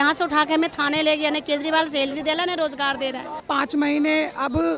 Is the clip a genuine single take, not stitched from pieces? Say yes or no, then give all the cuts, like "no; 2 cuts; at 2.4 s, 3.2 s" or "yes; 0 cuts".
no; 1 cut; at 3.4 s